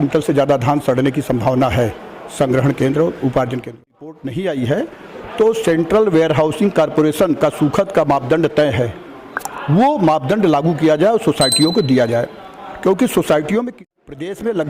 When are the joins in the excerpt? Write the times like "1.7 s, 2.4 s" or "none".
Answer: 4.2 s, 13.8 s